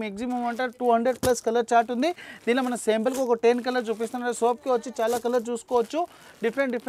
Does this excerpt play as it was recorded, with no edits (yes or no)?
yes